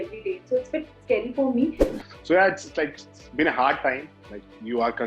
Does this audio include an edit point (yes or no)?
yes